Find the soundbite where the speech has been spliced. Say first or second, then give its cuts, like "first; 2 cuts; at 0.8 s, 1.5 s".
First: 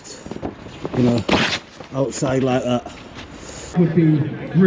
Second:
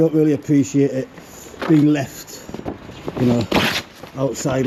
first; 1 cut; at 3.7 s